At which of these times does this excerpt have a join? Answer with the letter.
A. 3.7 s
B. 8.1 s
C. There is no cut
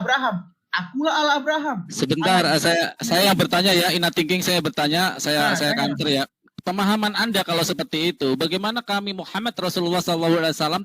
C